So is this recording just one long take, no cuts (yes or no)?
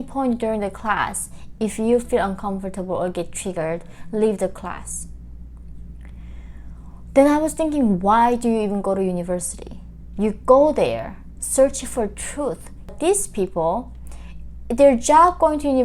no